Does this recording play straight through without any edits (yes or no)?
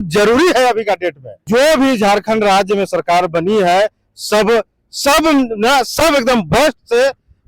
no